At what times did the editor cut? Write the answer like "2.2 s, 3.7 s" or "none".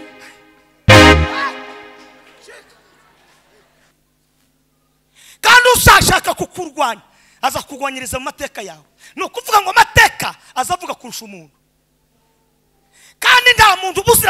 3.9 s